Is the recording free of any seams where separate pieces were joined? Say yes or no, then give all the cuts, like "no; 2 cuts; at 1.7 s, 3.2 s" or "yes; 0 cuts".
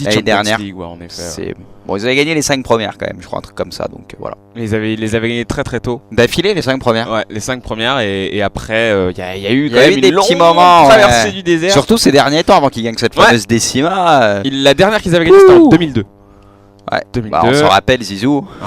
no; 1 cut; at 9.7 s